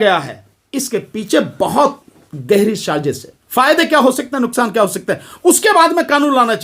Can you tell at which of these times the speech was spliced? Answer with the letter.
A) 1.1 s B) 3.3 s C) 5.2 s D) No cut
B